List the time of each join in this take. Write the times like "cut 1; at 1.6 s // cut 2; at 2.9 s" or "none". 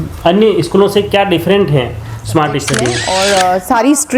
cut 1; at 3.2 s

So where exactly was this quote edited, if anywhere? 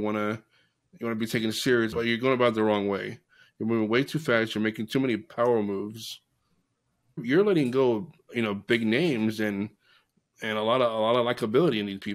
cut 1; at 1.9 s // cut 2; at 7.2 s

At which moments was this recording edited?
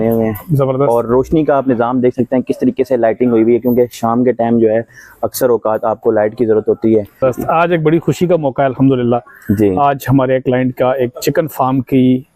cut 1; at 7.2 s

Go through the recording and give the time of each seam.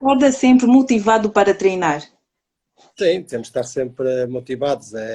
cut 1; at 3.9 s

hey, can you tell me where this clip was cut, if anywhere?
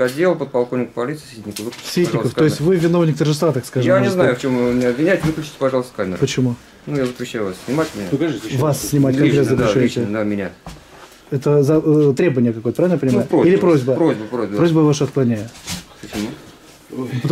none

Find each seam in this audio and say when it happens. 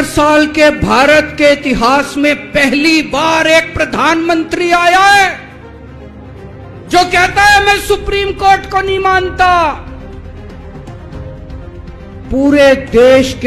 none

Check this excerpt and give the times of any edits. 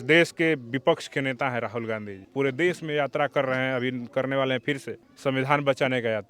cut 1; at 2.2 s

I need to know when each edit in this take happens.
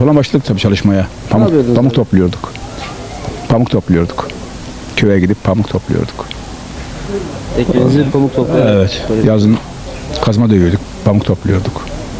none

